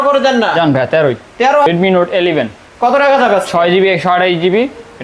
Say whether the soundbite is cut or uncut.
cut